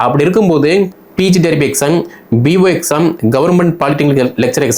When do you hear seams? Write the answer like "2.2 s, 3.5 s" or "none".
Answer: 1.0 s